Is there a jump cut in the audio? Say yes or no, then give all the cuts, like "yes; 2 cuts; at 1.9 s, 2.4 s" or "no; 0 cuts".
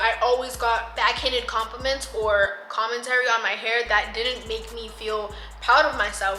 no; 0 cuts